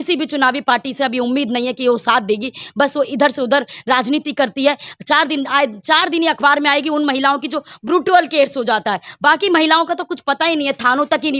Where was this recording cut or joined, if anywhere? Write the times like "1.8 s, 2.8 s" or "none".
none